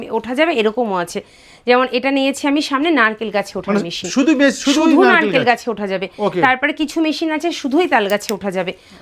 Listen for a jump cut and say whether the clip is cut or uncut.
uncut